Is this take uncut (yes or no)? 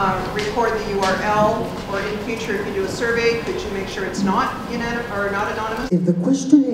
no